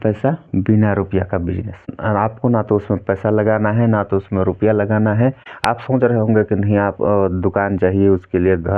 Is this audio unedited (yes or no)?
no